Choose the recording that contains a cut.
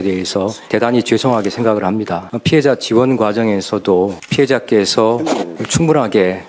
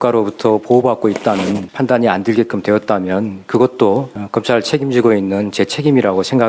first; 2 cuts; at 2.3 s, 4.2 s

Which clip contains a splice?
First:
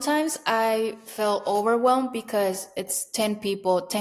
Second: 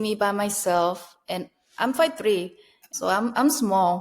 second; 1 cut; at 2.9 s

